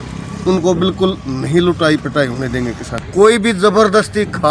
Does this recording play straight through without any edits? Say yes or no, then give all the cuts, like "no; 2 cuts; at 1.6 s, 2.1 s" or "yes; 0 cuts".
no; 1 cut; at 3.0 s